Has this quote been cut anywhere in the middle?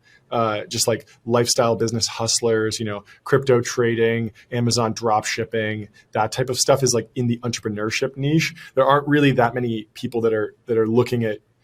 no; 0 cuts

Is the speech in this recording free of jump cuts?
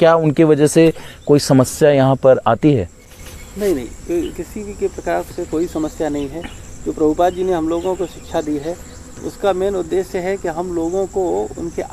yes; 0 cuts

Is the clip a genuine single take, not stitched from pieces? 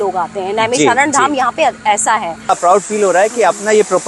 no; 1 cut; at 2.5 s

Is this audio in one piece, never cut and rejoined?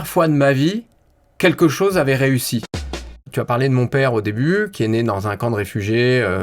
no; 1 cut; at 2.8 s

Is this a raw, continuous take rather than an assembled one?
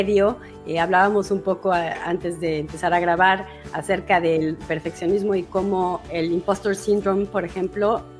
yes; 0 cuts

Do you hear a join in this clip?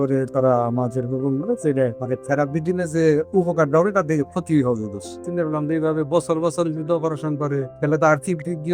yes; 3 cuts; at 2.0 s, 5.2 s, 7.7 s

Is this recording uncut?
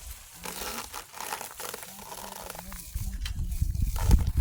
yes; 0 cuts

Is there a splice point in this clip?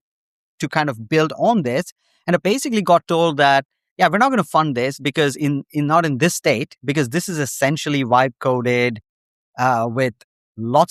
yes; 1 cut; at 2.4 s

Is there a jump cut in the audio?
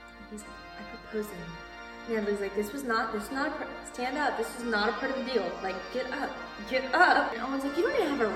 yes; 1 cut; at 7.4 s

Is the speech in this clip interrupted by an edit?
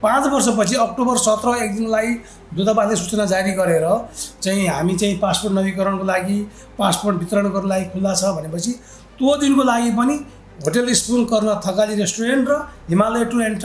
no; 0 cuts

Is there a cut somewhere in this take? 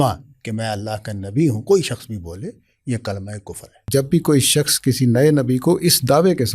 yes; 1 cut; at 3.9 s

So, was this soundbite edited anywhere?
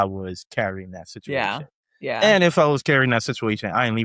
no; 0 cuts

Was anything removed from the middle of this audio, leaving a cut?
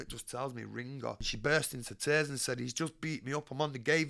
yes; 1 cut; at 1.3 s

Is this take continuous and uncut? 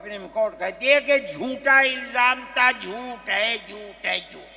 yes; 0 cuts

